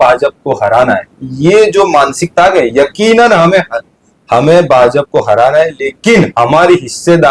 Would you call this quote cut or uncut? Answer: uncut